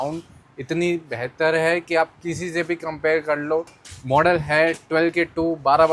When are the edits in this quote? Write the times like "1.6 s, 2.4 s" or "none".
3.8 s